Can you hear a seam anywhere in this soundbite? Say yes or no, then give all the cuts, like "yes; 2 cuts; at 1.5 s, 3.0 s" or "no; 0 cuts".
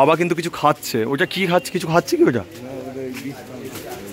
no; 0 cuts